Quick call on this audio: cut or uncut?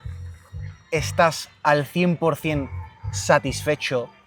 uncut